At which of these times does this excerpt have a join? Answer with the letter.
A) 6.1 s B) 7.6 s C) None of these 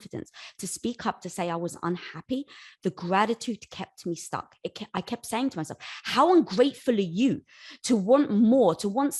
C